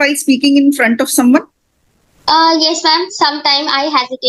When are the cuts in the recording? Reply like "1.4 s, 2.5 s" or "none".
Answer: none